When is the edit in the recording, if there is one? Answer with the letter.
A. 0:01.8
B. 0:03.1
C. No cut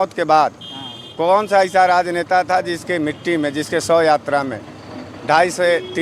C